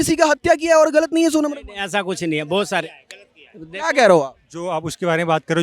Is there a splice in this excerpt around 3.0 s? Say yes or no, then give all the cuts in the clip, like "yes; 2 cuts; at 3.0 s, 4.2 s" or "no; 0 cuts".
no; 0 cuts